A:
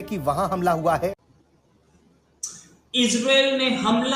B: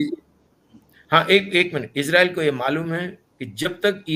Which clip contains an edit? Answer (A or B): A